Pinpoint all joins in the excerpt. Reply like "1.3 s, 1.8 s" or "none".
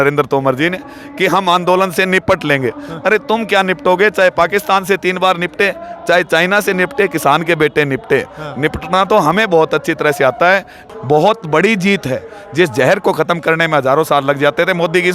10.8 s